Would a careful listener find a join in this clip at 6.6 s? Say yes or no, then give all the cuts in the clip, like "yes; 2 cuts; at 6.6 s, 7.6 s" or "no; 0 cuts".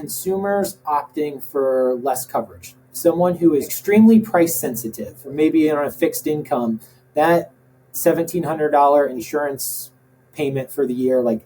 no; 3 cuts; at 3.7 s, 5.3 s, 9.1 s